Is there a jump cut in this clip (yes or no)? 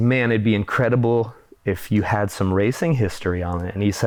no